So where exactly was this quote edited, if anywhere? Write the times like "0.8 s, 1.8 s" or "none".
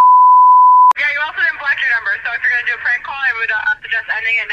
1.1 s